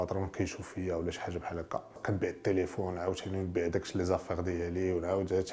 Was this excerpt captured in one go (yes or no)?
no